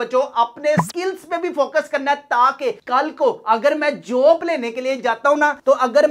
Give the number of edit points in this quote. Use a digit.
0